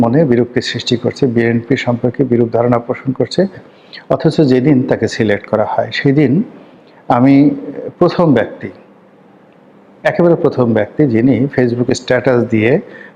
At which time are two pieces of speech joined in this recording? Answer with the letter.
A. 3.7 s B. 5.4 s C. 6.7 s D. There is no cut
A